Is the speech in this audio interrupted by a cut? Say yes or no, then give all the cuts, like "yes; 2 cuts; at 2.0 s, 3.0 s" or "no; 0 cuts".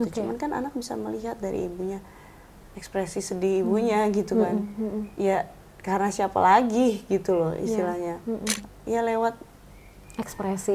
yes; 1 cut; at 8.7 s